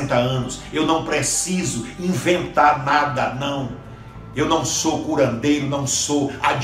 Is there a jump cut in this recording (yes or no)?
no